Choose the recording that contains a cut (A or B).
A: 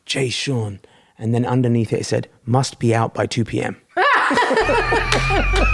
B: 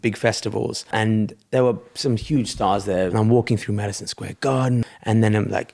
B